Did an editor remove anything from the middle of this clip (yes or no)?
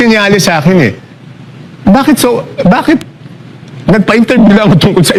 no